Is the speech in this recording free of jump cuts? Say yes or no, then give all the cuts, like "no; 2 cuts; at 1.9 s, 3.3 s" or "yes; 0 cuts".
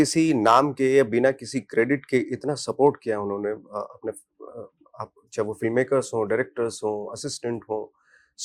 yes; 0 cuts